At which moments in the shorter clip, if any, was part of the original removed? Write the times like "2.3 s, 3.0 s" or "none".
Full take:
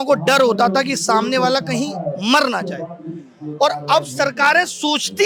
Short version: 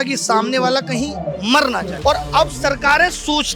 1.9 s